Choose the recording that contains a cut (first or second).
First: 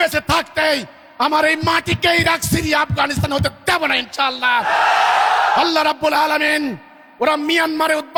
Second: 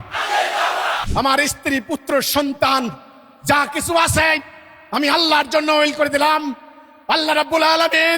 second